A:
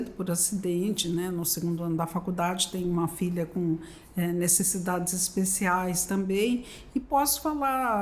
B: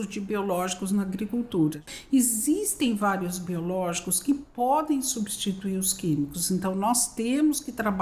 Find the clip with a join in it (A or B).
B